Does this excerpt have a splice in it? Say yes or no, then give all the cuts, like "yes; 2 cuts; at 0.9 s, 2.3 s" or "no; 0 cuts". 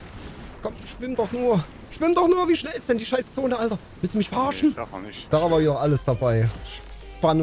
yes; 1 cut; at 5.2 s